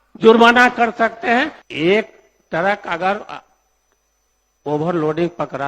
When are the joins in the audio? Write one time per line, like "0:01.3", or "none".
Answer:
0:01.6